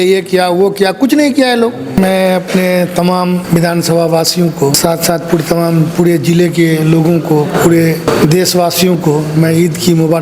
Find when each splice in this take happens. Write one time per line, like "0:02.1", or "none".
0:02.0
0:03.4
0:04.8
0:08.1